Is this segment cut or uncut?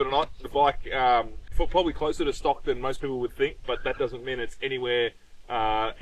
cut